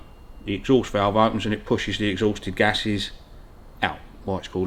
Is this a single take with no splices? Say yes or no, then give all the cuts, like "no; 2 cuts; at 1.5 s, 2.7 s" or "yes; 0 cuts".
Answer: yes; 0 cuts